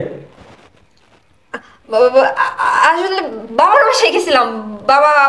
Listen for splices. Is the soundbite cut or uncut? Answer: uncut